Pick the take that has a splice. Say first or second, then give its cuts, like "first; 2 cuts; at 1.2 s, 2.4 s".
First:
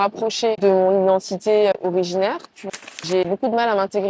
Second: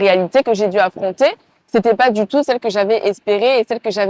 first; 1 cut; at 3.1 s